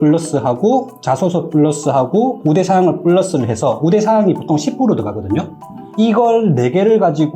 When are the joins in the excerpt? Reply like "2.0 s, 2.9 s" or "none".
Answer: 5.9 s